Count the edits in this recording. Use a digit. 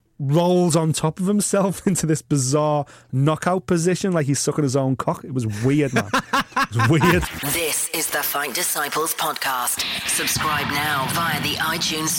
1